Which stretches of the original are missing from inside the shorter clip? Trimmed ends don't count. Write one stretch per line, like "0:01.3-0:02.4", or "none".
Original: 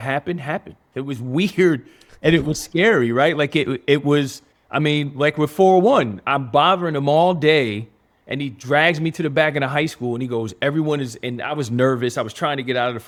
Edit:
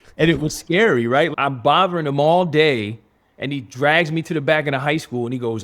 0:03.4-0:06.2